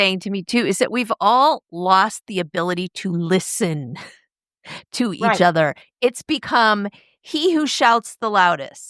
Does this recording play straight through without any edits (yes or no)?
yes